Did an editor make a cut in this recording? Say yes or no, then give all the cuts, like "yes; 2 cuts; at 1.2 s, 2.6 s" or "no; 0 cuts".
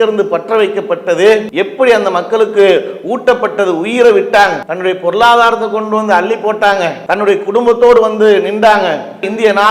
yes; 3 cuts; at 1.5 s, 4.7 s, 7.0 s